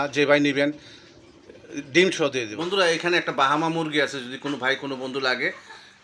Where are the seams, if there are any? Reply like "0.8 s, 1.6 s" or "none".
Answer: 2.5 s